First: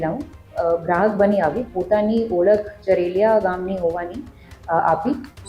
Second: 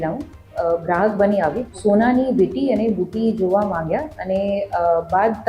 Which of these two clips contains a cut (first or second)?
second